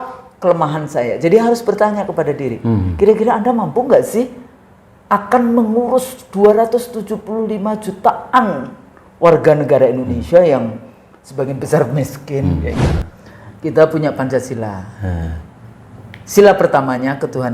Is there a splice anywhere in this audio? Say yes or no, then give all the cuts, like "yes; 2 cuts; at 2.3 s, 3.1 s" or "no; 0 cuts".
yes; 1 cut; at 12.8 s